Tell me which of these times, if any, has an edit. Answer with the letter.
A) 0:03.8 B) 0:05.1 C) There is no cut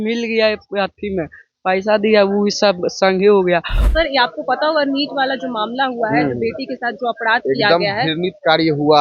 A